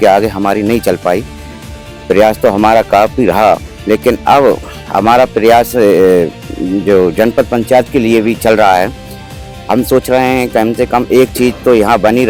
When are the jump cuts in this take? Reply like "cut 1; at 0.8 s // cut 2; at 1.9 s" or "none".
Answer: none